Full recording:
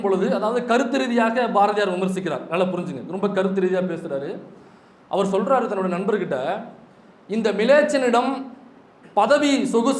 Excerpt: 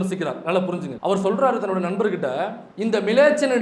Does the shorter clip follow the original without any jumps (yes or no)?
no